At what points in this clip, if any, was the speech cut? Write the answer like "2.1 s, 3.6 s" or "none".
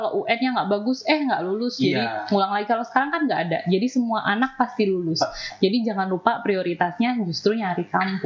none